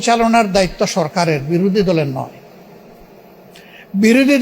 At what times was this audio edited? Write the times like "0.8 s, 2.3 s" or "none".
none